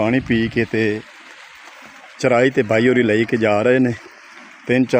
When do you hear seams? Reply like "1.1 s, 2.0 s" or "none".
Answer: none